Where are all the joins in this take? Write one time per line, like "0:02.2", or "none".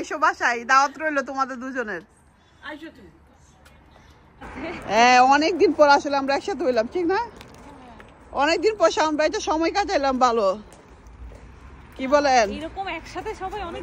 0:04.3